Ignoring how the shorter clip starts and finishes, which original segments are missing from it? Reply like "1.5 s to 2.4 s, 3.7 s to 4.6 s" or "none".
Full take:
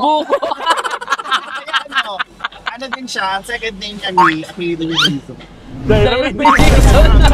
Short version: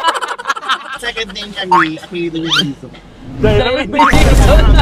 1.6 s to 3.5 s